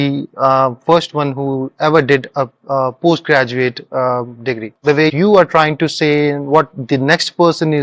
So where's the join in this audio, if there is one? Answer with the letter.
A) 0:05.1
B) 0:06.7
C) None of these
A